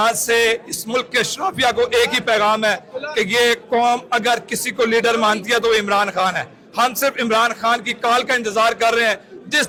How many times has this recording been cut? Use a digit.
0